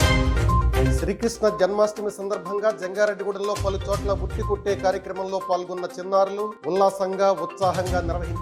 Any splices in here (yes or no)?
yes